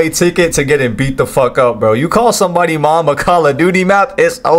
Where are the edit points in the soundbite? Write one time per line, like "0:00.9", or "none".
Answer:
none